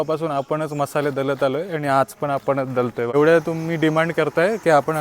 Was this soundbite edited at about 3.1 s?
yes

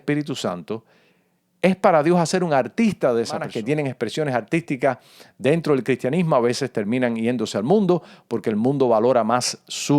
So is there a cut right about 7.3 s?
no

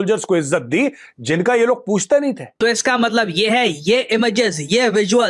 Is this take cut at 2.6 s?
yes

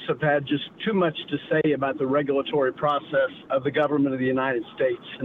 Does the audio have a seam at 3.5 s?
yes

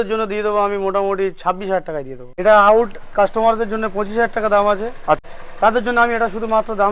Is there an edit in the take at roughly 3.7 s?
no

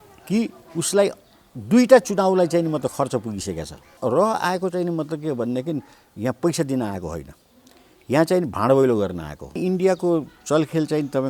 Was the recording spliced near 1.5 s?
no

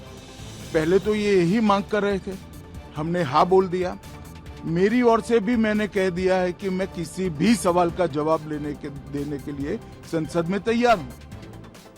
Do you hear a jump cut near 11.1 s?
yes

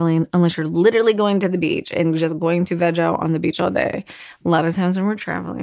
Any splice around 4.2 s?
no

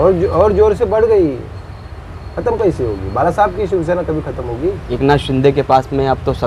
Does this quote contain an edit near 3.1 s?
no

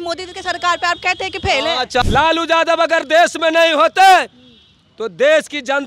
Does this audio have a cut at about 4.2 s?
no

